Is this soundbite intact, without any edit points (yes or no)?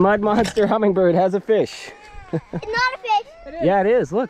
yes